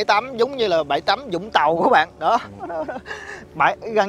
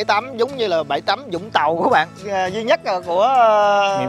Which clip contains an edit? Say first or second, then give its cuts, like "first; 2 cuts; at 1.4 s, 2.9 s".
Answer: second; 1 cut; at 2.1 s